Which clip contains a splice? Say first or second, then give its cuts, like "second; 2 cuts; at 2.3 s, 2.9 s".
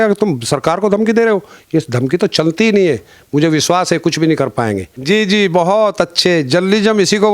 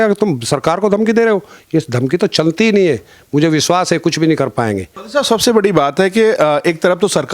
first; 1 cut; at 4.9 s